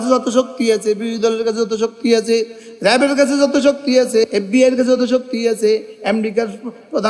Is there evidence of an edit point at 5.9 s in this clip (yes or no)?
no